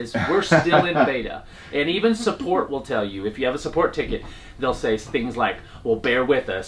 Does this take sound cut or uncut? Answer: uncut